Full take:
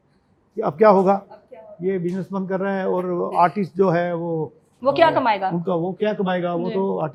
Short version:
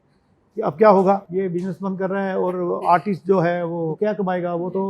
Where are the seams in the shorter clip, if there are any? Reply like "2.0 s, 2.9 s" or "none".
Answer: 1.3 s, 3.9 s